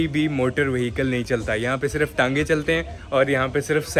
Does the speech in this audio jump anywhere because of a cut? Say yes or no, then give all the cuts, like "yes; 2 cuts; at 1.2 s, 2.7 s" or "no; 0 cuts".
no; 0 cuts